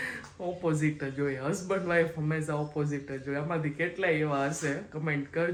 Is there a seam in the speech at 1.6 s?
no; 0 cuts

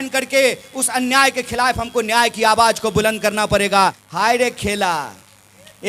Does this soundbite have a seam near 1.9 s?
no; 1 cut; at 4.0 s

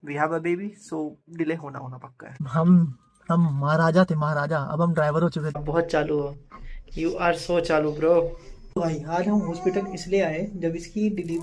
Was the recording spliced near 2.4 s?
yes; 2 cuts; at 2.4 s, 5.6 s

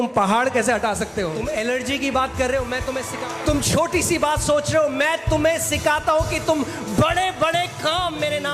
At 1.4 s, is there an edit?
yes; 2 cuts; at 1.4 s, 3.1 s

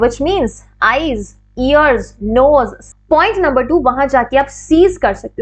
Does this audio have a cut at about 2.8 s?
yes; 1 cut; at 2.8 s

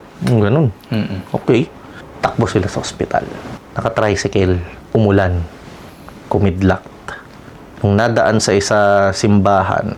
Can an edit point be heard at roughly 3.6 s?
no; 0 cuts

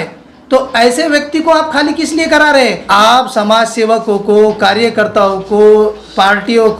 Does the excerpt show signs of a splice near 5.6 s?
no; 1 cut; at 2.8 s

